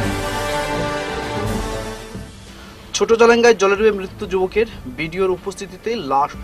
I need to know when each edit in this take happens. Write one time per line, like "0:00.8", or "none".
0:01.7